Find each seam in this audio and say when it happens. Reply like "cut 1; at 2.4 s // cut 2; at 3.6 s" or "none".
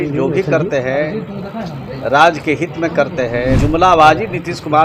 cut 1; at 3.6 s